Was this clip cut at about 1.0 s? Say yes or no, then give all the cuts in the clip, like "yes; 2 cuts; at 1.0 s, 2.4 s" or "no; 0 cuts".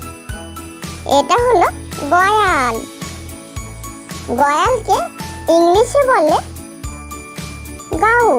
yes; 1 cut; at 1.0 s